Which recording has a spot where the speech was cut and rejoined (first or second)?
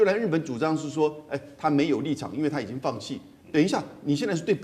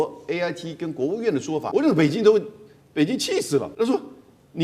second